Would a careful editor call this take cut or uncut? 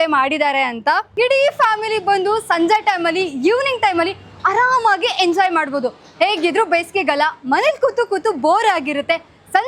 cut